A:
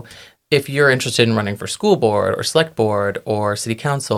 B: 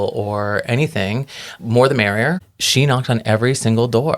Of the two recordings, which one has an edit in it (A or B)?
B